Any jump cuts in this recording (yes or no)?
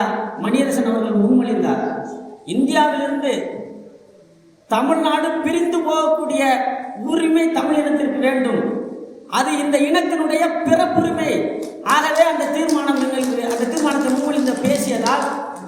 no